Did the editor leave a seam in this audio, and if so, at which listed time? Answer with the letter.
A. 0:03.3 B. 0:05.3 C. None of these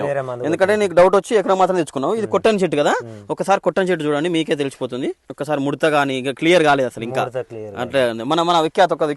B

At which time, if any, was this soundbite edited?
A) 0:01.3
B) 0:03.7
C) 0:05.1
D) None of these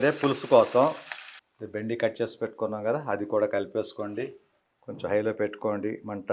A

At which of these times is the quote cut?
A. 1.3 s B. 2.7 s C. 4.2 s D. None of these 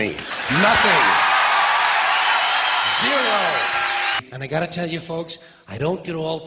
C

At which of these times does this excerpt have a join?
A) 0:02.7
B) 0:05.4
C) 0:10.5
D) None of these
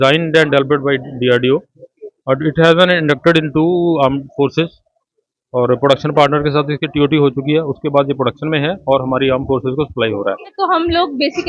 C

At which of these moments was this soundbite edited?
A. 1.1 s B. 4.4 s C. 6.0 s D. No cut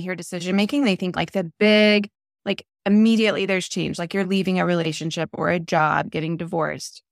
A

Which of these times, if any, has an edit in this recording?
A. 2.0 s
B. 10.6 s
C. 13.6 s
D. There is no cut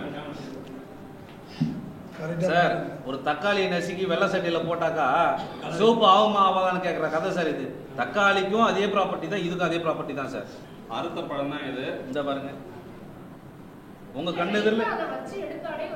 B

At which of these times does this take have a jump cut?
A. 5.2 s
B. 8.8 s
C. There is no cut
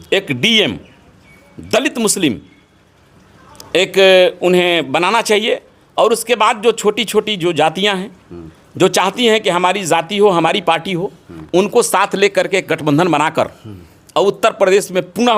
C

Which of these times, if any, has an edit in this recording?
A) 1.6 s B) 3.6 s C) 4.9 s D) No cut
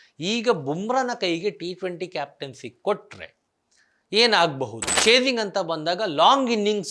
C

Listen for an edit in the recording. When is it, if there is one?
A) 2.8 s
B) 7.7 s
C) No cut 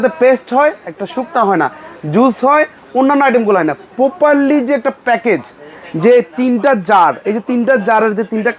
C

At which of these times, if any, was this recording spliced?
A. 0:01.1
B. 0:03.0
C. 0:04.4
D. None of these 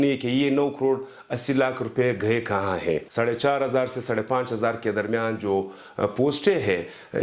B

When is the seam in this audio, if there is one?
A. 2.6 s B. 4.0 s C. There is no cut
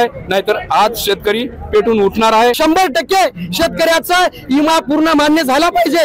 A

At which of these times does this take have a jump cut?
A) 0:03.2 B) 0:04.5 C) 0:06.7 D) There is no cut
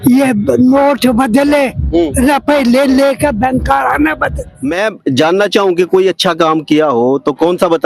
B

